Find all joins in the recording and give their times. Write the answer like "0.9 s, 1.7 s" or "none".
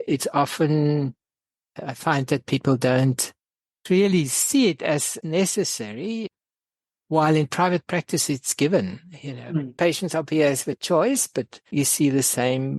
none